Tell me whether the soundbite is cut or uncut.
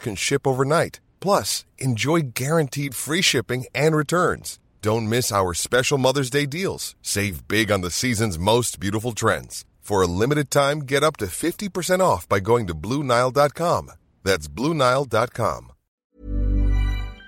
cut